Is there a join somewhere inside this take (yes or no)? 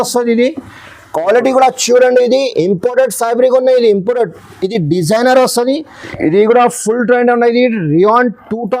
yes